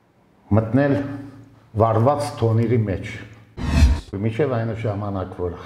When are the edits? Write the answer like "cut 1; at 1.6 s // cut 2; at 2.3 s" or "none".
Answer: cut 1; at 3.8 s